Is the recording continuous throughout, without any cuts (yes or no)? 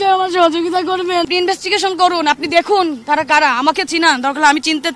no